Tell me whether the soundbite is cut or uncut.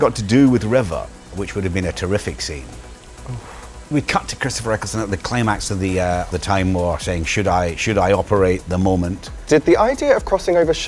cut